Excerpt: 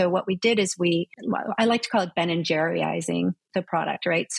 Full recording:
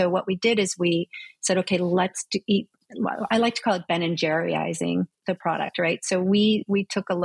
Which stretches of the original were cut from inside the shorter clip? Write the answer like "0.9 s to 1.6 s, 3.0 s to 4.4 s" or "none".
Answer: 1.1 s to 2.9 s